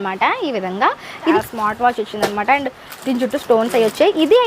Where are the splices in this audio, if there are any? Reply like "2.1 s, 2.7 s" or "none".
1.4 s